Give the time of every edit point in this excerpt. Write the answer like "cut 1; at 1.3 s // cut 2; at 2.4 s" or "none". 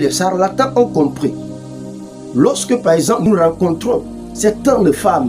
cut 1; at 3.3 s